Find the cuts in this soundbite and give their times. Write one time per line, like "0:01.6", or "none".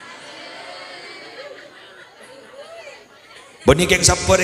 0:03.5